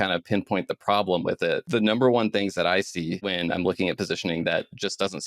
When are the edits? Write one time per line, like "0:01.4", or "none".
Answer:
0:01.6
0:03.3